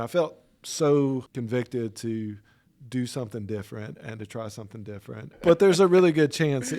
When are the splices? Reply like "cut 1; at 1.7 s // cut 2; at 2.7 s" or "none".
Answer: cut 1; at 1.3 s // cut 2; at 5.4 s